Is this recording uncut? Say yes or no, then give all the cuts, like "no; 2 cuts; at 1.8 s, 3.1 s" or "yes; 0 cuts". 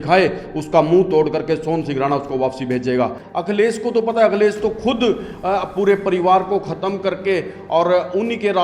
no; 1 cut; at 3.2 s